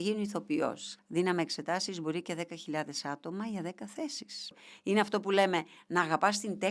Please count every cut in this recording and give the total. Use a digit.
2